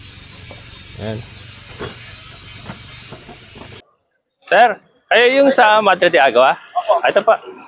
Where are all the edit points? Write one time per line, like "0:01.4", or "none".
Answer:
0:04.0